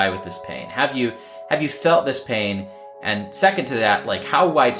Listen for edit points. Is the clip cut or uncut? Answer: uncut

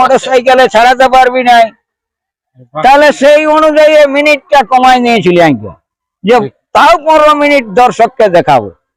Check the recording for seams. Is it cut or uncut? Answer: uncut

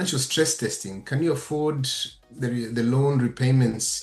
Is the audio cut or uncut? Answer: uncut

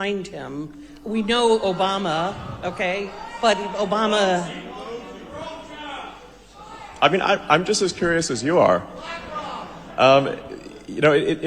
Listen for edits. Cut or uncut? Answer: uncut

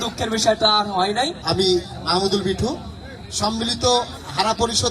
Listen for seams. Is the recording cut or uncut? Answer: cut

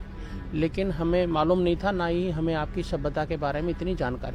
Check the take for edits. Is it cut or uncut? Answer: uncut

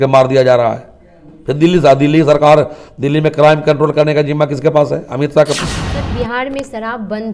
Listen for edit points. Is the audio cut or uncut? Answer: cut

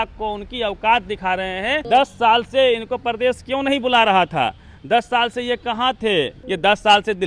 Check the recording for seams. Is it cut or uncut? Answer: cut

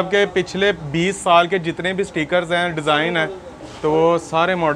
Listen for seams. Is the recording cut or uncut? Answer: uncut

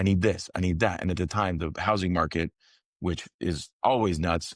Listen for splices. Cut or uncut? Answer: uncut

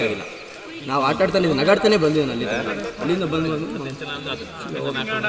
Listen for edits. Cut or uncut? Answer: uncut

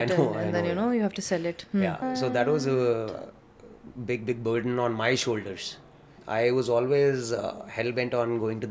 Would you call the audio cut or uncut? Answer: cut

